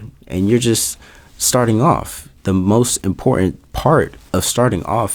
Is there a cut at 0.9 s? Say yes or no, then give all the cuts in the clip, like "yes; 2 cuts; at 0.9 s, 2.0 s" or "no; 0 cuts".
no; 0 cuts